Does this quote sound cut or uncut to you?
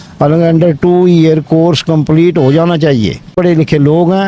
cut